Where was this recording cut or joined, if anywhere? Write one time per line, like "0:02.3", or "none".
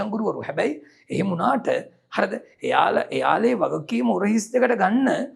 none